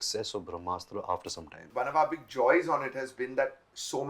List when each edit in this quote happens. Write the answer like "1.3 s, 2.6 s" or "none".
1.7 s